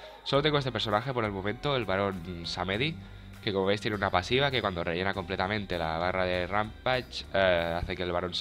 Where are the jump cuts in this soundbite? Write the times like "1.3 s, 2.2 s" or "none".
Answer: 2.4 s

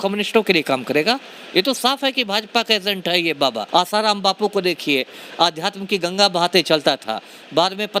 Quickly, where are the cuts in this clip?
3.6 s

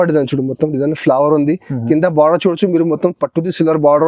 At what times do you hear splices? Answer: none

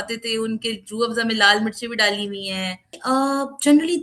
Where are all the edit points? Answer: 2.9 s

